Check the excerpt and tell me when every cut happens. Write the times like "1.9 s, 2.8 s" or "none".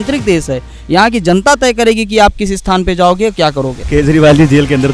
3.8 s